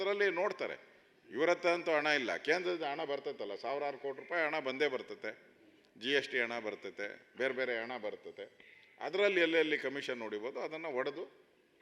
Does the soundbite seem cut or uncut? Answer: uncut